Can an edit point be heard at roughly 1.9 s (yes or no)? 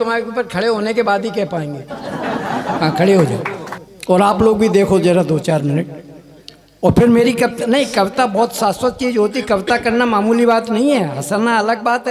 yes